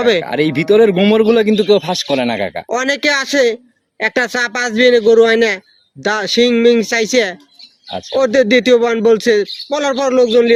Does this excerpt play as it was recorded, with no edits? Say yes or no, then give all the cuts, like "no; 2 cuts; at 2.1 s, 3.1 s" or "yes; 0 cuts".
yes; 0 cuts